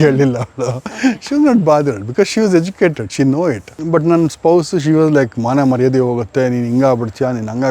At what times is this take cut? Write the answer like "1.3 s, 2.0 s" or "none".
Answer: 3.7 s